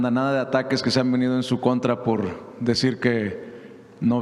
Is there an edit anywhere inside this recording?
no; 0 cuts

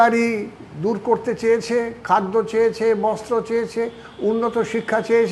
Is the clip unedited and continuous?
yes; 0 cuts

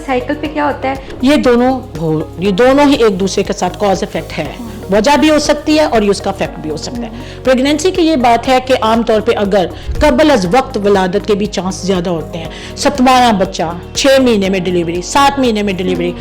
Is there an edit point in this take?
yes; 2 cuts; at 1.1 s, 9.8 s

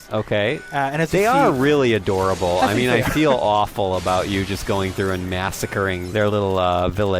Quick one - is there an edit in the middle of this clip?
yes; 1 cut; at 6.0 s

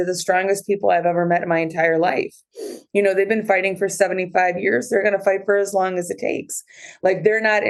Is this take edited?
no; 0 cuts

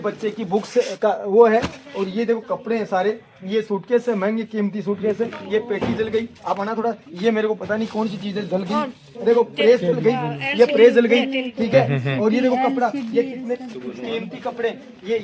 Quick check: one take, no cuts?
yes; 0 cuts

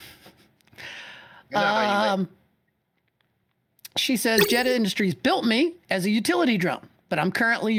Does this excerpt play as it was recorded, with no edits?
yes; 0 cuts

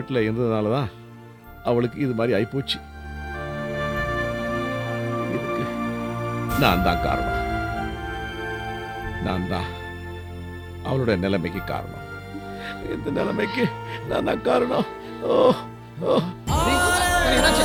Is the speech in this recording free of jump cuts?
yes; 0 cuts

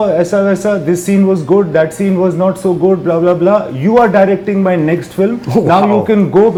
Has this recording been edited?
no; 0 cuts

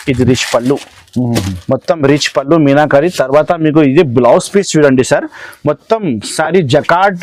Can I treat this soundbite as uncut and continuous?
yes; 0 cuts

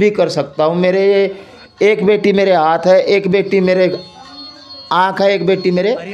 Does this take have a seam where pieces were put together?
no; 0 cuts

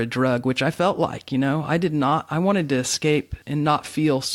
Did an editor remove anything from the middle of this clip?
yes; 1 cut; at 3.4 s

